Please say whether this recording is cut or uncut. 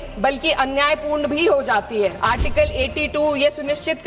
cut